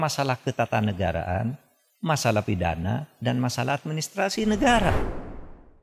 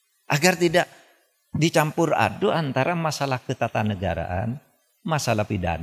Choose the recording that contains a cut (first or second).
first